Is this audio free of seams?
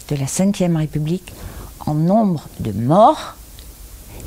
yes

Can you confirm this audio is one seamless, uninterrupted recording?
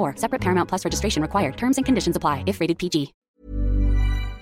no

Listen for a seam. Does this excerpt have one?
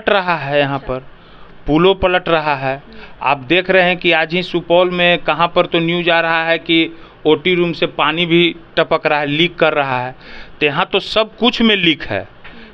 no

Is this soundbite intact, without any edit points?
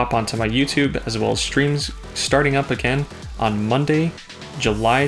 yes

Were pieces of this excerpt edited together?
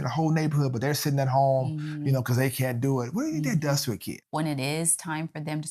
yes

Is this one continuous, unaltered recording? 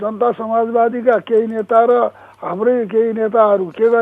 yes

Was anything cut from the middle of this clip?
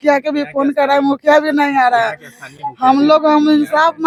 no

